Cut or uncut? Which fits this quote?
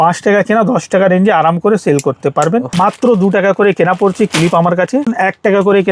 cut